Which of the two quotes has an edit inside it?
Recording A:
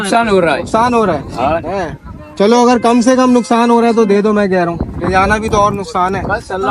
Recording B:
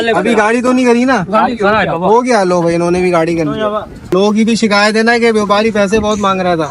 B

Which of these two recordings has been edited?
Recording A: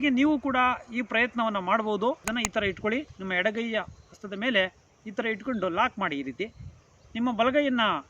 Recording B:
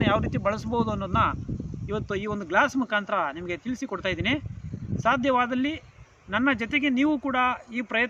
A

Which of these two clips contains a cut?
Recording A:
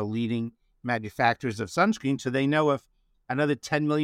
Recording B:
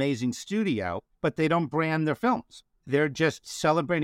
B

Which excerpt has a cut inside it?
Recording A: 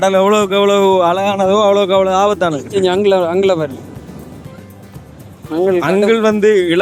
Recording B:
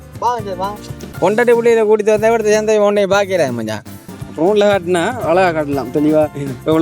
B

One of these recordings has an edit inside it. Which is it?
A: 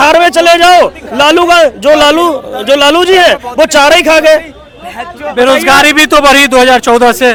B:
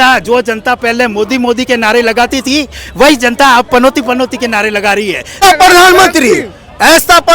B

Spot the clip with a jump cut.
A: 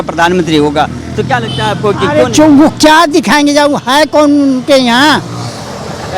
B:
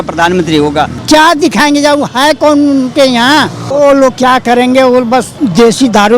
B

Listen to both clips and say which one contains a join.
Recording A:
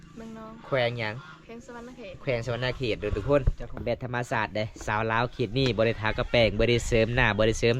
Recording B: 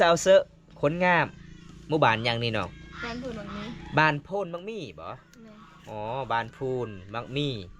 A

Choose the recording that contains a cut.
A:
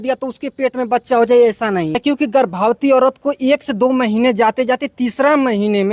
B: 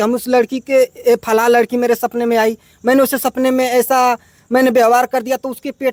A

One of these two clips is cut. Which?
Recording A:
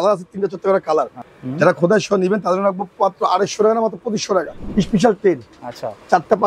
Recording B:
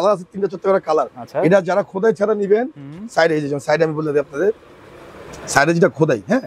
A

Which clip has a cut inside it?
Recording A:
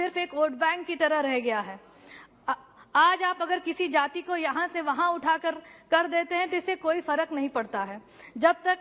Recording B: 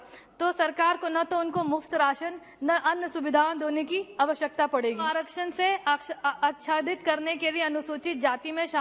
B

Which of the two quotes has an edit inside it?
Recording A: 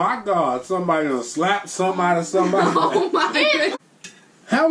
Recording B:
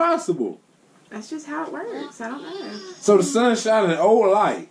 A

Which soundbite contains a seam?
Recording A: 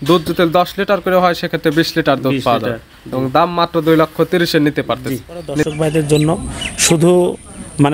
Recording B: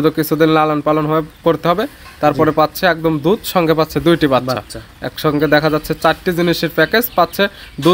A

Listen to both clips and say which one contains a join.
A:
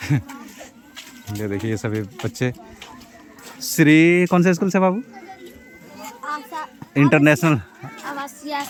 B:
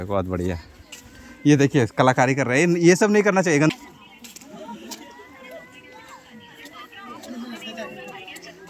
B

